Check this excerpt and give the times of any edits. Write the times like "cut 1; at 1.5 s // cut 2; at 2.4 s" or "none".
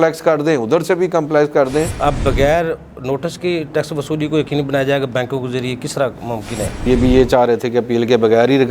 cut 1; at 1.9 s // cut 2; at 6.8 s